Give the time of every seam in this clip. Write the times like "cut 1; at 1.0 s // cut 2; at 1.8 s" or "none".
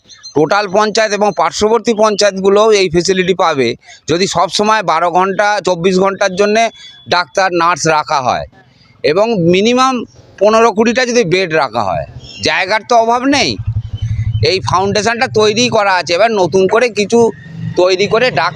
none

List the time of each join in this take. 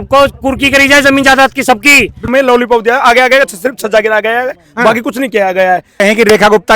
cut 1; at 2.3 s // cut 2; at 6.0 s

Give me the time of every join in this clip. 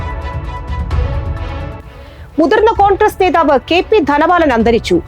cut 1; at 1.7 s

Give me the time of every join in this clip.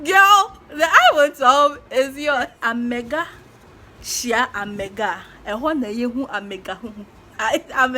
cut 1; at 2.4 s

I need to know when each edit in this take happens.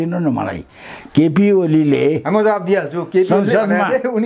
none

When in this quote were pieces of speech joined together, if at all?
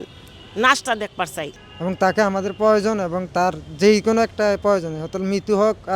cut 1; at 1.6 s

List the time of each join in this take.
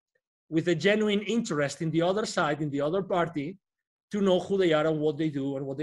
none

